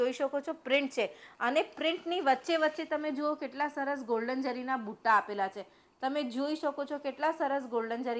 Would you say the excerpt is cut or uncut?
uncut